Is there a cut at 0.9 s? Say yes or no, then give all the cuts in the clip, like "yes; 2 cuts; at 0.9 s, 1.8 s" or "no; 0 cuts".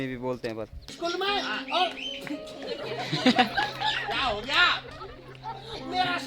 yes; 1 cut; at 0.9 s